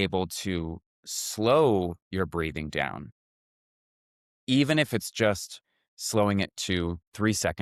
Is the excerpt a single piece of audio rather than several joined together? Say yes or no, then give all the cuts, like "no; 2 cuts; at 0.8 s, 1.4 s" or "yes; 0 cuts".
yes; 0 cuts